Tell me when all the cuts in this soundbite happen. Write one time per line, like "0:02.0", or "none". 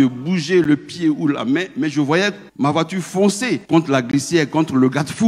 0:02.4
0:03.6